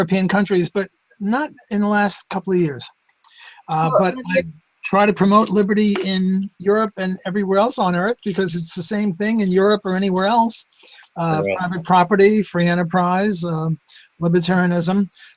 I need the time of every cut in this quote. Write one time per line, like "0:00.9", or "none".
0:03.4